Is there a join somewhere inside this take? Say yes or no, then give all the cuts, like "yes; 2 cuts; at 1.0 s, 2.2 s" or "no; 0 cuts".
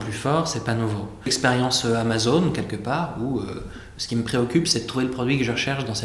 yes; 1 cut; at 1.3 s